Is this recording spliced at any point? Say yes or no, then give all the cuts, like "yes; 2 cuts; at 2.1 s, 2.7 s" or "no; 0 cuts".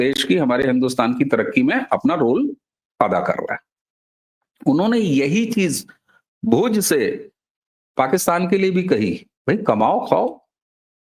no; 0 cuts